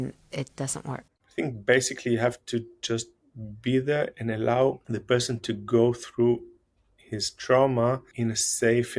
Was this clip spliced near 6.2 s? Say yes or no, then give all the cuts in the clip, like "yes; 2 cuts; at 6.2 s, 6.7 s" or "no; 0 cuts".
no; 3 cuts; at 1.1 s, 4.9 s, 8.1 s